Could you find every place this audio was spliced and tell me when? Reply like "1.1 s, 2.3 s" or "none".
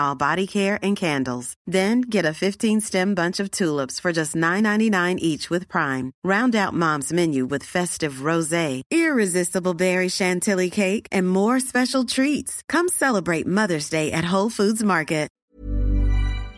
15.4 s